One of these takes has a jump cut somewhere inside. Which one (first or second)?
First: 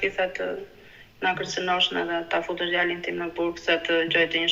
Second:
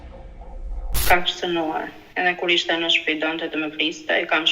second